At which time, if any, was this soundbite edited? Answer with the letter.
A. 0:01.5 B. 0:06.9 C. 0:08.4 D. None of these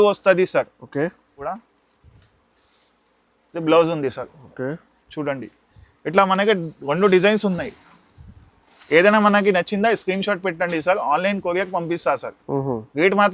A